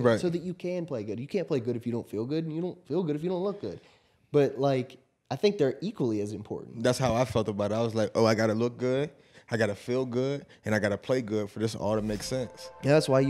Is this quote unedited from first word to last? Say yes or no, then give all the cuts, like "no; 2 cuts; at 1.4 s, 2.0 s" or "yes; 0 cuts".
yes; 0 cuts